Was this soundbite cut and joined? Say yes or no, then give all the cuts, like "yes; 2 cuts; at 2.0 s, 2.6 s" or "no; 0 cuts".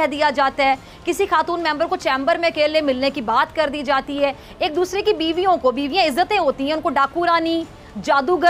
no; 0 cuts